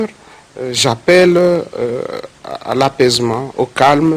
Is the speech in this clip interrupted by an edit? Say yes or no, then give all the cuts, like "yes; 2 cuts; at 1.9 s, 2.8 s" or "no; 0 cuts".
yes; 1 cut; at 1.5 s